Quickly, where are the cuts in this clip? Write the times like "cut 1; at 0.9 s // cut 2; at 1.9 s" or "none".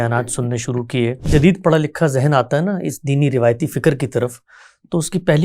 cut 1; at 1.3 s